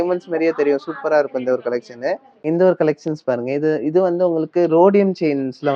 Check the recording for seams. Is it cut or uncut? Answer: uncut